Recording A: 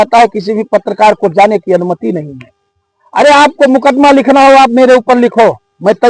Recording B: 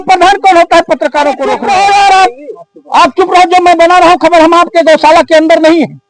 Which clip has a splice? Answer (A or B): B